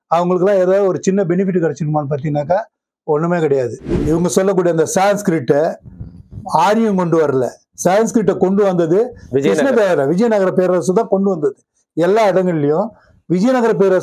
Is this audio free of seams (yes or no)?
no